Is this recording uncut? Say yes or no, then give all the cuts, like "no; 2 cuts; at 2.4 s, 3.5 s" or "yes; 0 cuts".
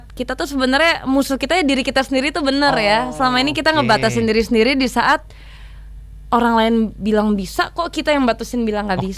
yes; 0 cuts